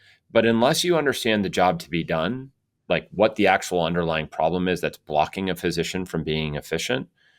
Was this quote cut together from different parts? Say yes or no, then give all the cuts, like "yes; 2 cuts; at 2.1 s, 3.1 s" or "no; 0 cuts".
no; 0 cuts